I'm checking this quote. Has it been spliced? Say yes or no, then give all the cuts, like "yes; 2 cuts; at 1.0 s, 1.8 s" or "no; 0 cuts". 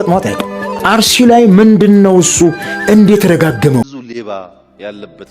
yes; 1 cut; at 3.8 s